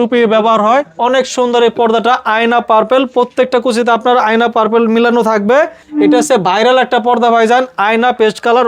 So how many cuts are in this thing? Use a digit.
2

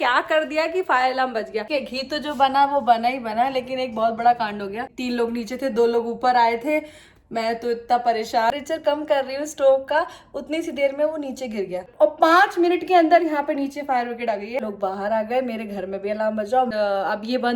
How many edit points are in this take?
6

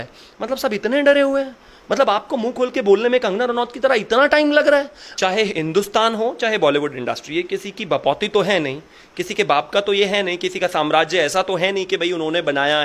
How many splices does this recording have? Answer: 1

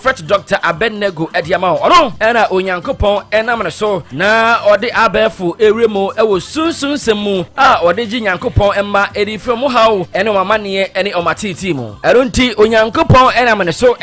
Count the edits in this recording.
0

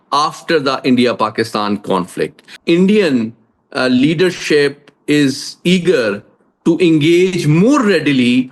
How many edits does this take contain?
1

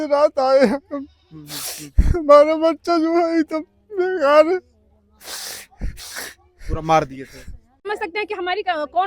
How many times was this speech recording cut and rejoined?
1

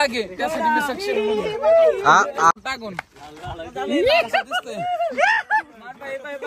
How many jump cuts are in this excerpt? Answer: 1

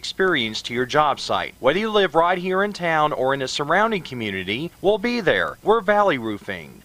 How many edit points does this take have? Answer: 1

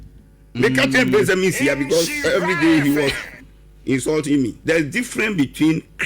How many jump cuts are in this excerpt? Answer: 1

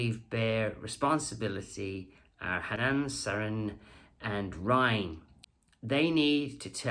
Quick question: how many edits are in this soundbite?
0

